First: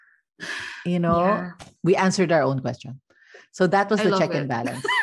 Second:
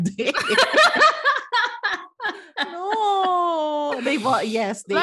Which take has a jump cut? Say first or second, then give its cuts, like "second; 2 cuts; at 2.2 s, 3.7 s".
first; 1 cut; at 1.7 s